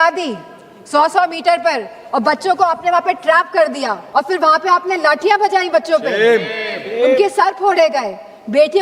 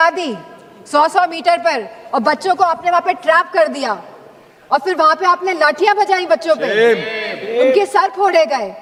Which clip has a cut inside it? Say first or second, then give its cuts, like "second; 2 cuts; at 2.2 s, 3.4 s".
first; 1 cut; at 4.0 s